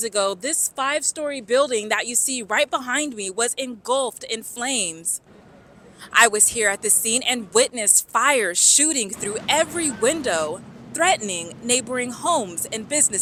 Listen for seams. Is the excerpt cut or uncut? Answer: uncut